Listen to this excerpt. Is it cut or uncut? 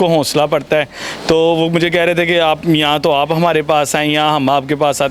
uncut